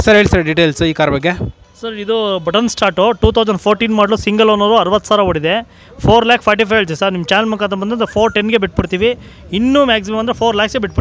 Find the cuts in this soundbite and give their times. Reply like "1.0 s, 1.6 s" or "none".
none